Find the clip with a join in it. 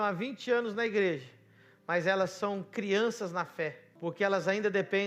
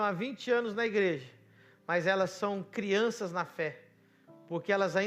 first; 1 cut; at 3.8 s

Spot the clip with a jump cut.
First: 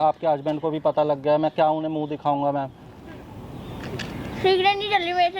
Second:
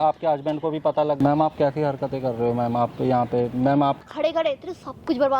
second; 2 cuts; at 1.2 s, 4.0 s

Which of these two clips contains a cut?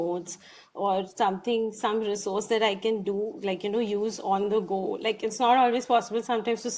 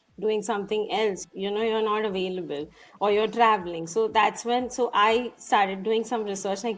second; 1 cut; at 1.2 s

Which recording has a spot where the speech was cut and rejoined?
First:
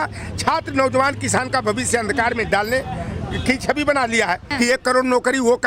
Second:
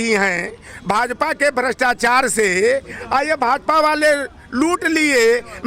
first; 1 cut; at 4.5 s

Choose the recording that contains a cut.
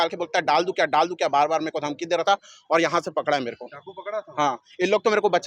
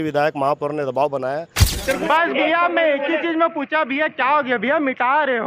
second; 1 cut; at 1.7 s

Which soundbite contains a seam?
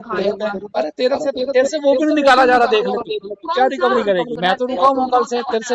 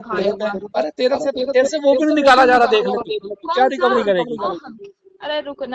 first; 1 cut; at 4.3 s

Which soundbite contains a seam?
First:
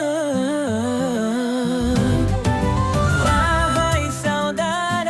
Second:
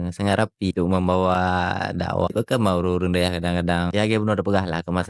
second; 3 cuts; at 0.7 s, 2.3 s, 3.9 s

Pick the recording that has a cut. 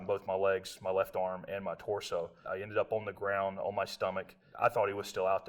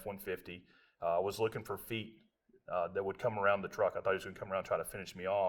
first; 2 cuts; at 2.4 s, 4.4 s

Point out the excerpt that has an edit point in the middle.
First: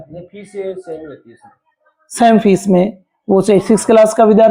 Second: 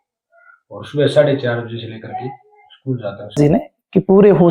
second; 1 cut; at 3.4 s

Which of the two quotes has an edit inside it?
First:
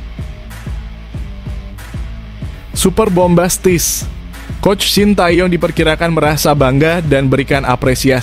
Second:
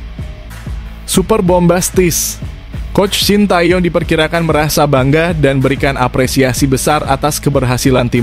second; 1 cut; at 1.2 s

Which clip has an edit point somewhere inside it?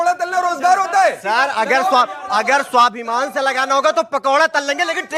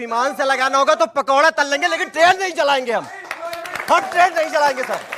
second; 1 cut; at 3.4 s

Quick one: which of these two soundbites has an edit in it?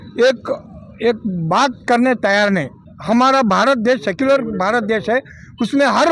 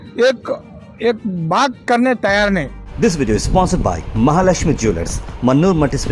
second; 1 cut; at 2.8 s

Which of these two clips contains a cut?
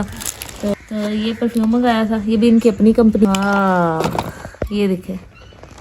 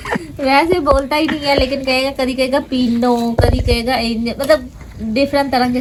first; 2 cuts; at 0.7 s, 3.2 s

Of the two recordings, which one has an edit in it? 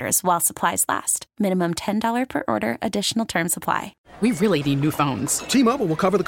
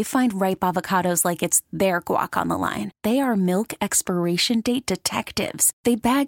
first; 1 cut; at 4.0 s

